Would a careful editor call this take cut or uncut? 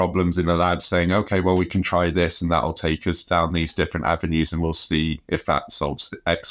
uncut